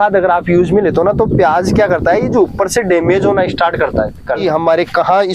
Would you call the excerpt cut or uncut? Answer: cut